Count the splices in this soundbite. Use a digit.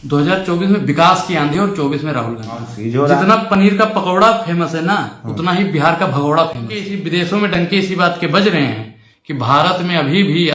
2